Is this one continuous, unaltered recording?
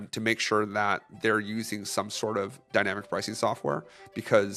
yes; 0 cuts

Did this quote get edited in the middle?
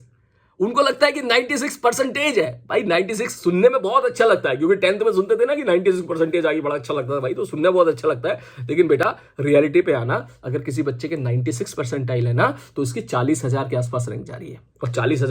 no; 0 cuts

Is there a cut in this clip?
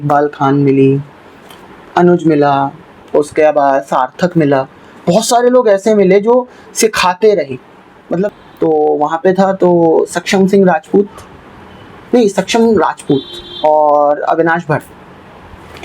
yes; 1 cut; at 8.3 s

